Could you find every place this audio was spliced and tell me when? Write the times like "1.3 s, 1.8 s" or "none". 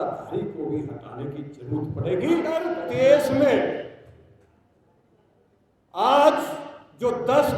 2.7 s